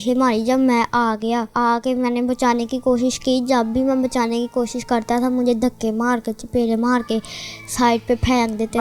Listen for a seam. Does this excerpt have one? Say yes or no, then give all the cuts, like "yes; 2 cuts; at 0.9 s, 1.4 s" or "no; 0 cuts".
yes; 1 cut; at 1.5 s